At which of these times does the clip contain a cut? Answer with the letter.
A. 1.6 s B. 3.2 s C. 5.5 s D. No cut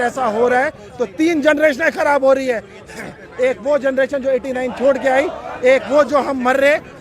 D